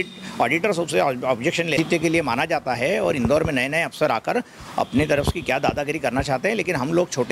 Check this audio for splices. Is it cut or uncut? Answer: cut